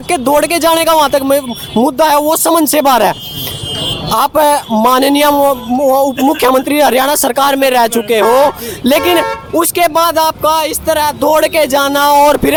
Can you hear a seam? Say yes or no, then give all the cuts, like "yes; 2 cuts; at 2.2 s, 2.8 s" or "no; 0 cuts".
no; 0 cuts